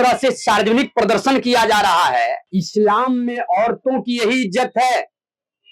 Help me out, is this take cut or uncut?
cut